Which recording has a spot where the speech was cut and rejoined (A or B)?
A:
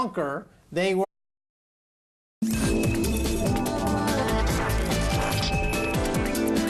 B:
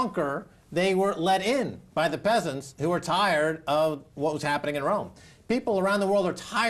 B